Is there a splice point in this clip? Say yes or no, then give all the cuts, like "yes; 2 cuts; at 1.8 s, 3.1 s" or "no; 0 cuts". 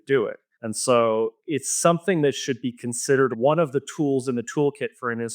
yes; 1 cut; at 3.3 s